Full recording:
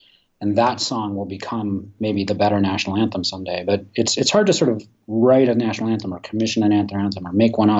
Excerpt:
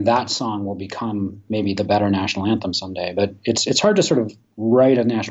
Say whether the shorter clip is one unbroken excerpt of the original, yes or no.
yes